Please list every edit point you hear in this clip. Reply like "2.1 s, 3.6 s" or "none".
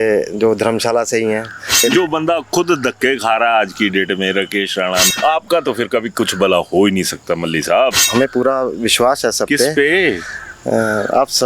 1.8 s, 5.1 s, 8.1 s